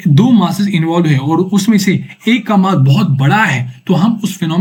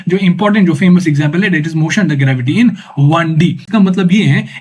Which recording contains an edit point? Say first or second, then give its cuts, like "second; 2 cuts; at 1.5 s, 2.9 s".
second; 1 cut; at 3.7 s